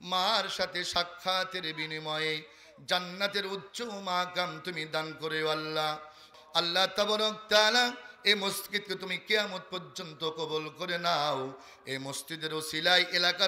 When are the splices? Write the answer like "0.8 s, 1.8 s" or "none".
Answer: 6.3 s